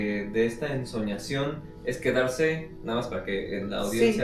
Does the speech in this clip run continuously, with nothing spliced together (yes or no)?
yes